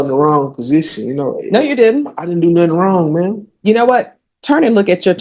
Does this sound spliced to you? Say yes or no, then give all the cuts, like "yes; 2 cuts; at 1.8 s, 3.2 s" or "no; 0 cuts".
no; 0 cuts